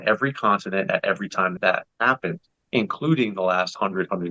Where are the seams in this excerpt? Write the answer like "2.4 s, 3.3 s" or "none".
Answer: 1.5 s